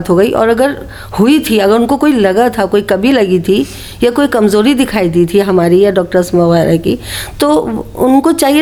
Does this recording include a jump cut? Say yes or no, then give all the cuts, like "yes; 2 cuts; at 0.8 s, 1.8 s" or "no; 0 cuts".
no; 0 cuts